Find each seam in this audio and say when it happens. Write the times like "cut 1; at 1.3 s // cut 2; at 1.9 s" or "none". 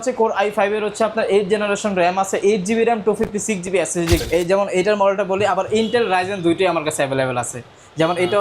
cut 1; at 4.2 s